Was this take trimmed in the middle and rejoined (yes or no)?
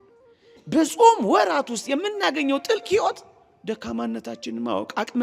no